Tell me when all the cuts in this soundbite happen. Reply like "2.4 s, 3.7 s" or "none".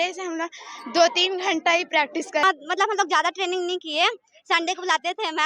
2.4 s